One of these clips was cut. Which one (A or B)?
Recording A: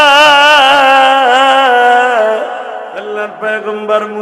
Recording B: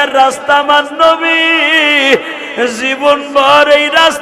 A